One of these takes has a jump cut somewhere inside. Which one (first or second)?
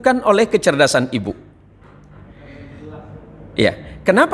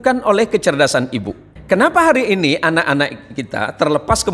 second